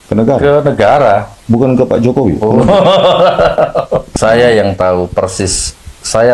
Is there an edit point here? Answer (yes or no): yes